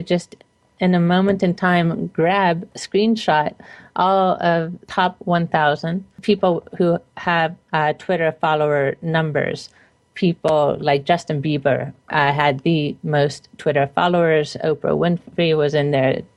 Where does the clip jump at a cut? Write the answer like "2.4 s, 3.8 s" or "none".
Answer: none